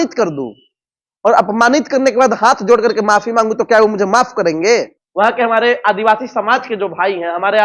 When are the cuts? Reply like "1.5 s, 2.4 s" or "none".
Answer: 5.0 s

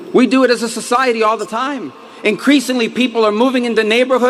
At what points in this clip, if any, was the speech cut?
1.0 s

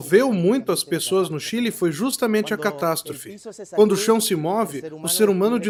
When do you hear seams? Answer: none

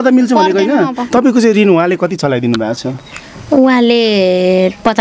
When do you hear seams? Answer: 1.0 s

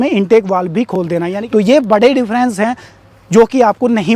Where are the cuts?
1.4 s

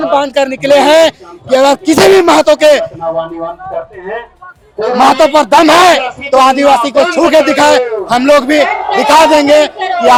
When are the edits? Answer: none

